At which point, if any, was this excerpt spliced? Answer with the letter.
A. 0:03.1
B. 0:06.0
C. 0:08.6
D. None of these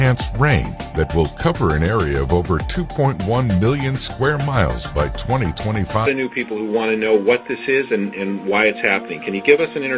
B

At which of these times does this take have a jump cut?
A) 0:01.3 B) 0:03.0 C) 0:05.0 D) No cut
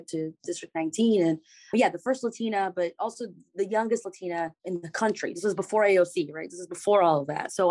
D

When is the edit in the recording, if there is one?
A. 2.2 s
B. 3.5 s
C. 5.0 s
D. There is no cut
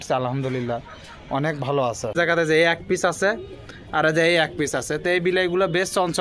A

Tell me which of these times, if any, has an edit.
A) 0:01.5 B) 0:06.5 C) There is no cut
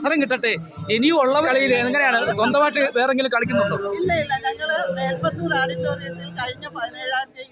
A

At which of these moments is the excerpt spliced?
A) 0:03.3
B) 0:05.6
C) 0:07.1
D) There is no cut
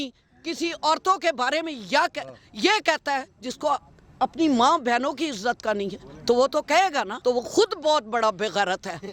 C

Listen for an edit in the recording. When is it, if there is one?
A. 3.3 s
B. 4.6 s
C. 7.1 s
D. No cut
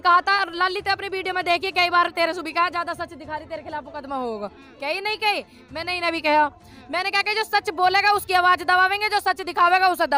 D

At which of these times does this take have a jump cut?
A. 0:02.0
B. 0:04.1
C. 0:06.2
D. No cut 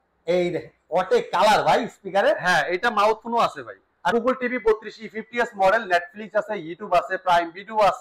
B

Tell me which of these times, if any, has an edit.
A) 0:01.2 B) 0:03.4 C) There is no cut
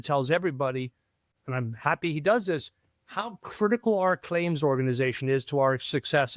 A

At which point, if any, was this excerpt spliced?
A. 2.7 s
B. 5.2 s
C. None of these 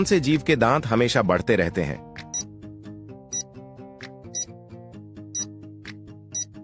C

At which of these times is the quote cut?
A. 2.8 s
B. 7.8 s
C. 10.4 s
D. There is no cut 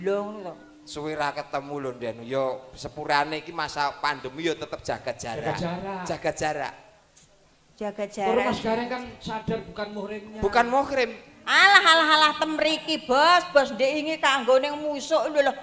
D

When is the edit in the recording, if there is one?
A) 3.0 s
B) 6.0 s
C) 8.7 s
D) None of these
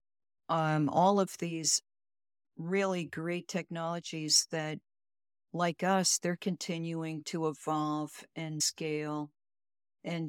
C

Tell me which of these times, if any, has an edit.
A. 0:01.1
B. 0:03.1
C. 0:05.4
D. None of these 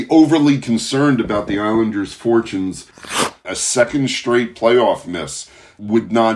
B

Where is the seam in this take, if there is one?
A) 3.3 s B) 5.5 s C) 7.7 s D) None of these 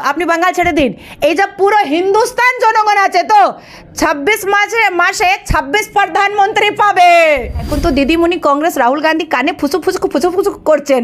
C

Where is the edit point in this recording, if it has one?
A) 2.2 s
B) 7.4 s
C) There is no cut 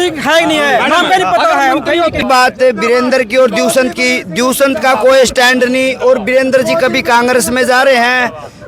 A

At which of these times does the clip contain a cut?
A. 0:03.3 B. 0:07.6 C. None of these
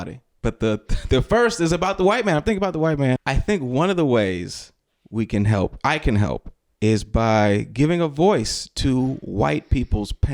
A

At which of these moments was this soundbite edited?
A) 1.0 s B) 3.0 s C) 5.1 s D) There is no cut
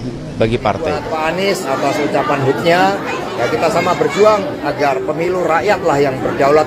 A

